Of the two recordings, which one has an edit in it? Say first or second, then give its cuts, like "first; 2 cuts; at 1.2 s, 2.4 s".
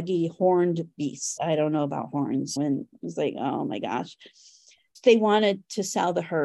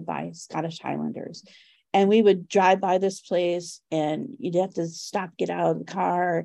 first; 1 cut; at 1.4 s